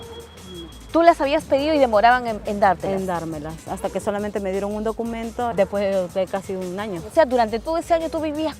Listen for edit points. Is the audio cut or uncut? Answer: cut